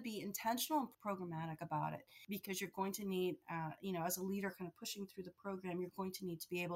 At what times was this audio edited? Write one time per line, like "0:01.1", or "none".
0:00.9
0:02.1